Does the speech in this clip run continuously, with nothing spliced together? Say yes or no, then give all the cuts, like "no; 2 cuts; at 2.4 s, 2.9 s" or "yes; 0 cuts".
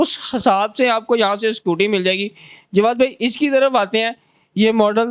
yes; 0 cuts